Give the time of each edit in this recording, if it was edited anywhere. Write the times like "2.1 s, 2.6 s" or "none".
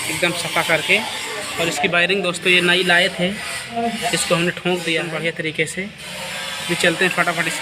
5.1 s

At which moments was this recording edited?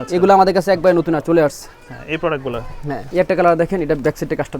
3.0 s

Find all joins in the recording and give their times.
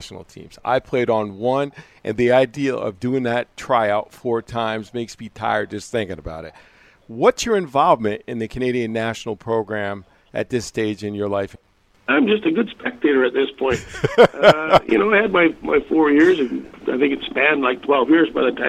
none

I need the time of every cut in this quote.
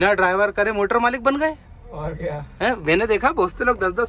none

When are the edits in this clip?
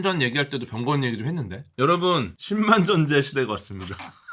1.7 s

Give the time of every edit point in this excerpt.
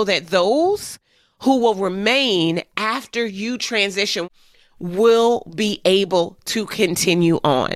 4.3 s

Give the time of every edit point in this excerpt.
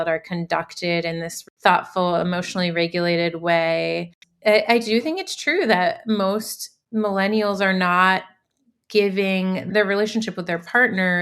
1.3 s, 4.2 s, 9.7 s

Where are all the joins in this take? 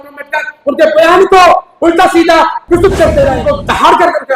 3.4 s

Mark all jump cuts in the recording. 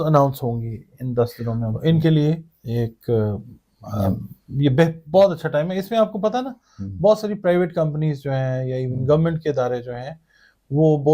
1.8 s

